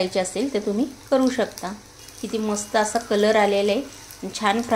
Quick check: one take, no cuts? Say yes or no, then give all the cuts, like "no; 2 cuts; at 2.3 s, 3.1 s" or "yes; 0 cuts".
no; 1 cut; at 2.5 s